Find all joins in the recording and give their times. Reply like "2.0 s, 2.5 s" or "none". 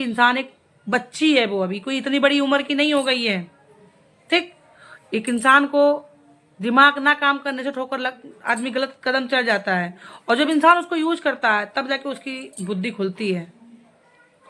none